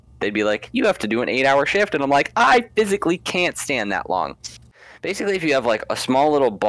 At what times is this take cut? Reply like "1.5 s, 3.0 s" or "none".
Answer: 4.7 s